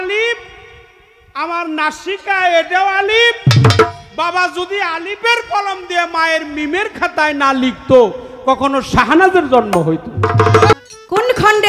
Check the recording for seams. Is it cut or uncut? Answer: cut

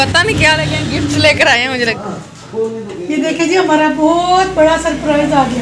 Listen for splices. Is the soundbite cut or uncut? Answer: cut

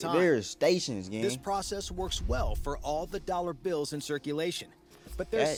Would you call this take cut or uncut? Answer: uncut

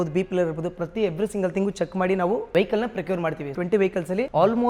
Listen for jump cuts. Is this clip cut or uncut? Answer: cut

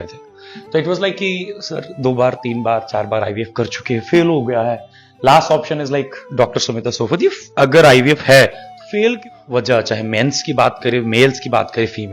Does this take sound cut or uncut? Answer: cut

